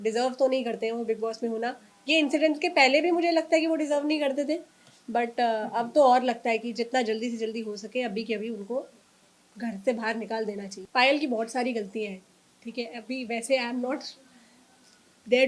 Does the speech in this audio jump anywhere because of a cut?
no; 0 cuts

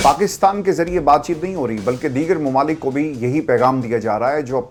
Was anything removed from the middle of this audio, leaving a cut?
no; 0 cuts

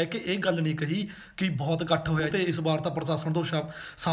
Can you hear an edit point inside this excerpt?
yes; 1 cut; at 2.3 s

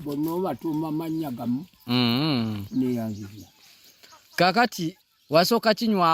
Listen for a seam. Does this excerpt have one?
yes; 1 cut; at 5.0 s

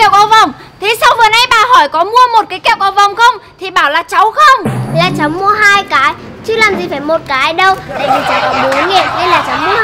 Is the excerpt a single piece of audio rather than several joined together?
yes; 0 cuts

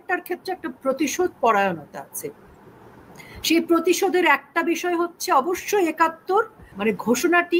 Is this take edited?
yes; 1 cut; at 6.6 s

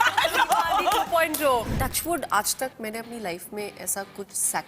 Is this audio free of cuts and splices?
no; 1 cut; at 1.8 s

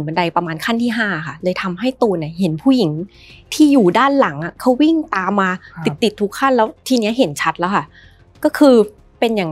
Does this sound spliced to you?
no; 0 cuts

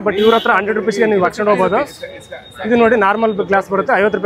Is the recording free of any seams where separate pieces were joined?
yes; 0 cuts

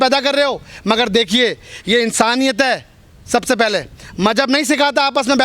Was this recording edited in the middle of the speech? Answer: no; 0 cuts

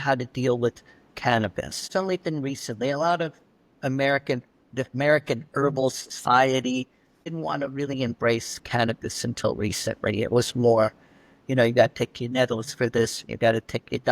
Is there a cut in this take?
yes; 2 cuts; at 1.8 s, 7.3 s

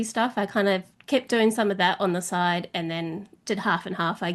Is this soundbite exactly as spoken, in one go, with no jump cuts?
yes; 0 cuts

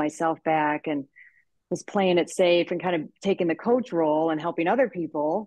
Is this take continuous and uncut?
yes; 0 cuts

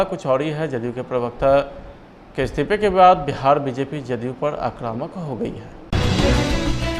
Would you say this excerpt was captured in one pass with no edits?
yes; 0 cuts

